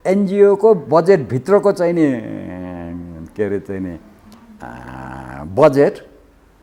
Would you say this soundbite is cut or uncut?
uncut